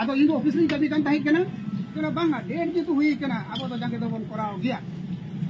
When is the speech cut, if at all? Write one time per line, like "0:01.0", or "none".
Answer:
0:01.9